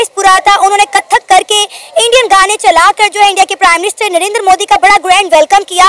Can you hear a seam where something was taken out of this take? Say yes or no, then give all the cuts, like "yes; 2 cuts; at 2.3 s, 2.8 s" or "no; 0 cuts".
no; 0 cuts